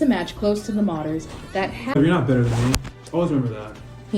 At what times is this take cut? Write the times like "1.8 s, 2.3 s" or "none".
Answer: 2.0 s